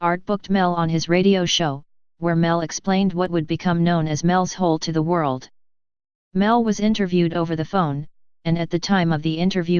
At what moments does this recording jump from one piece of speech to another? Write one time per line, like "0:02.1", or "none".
0:01.0